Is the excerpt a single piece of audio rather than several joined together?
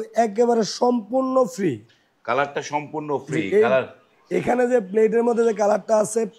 yes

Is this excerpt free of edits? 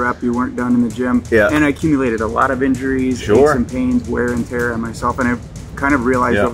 no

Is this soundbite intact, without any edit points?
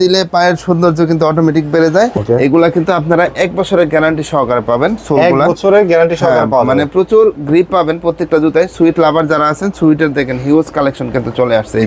no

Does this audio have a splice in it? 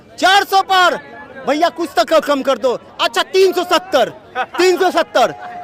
no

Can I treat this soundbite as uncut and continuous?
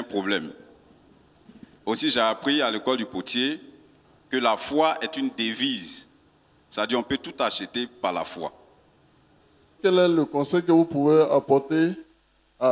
no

